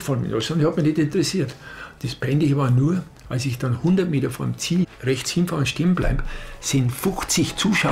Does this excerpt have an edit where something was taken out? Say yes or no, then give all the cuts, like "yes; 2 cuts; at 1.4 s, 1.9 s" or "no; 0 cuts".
yes; 1 cut; at 5.0 s